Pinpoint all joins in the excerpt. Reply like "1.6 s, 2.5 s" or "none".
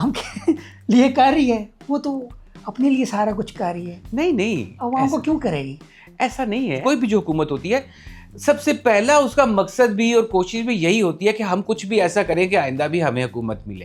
none